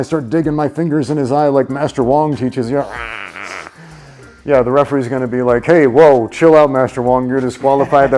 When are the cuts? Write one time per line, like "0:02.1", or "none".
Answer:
none